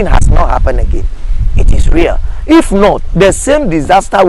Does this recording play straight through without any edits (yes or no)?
yes